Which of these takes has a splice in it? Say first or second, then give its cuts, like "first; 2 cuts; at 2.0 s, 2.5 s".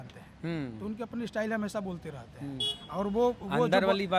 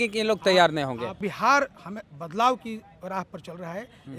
second; 1 cut; at 1.2 s